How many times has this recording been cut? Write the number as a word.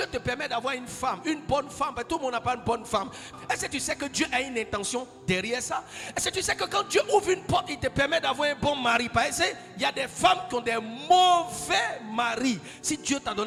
zero